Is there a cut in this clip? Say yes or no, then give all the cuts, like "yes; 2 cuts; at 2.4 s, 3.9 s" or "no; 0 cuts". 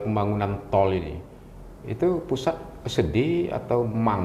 no; 0 cuts